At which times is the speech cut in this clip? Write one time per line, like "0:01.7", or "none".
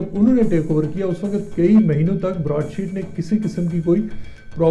none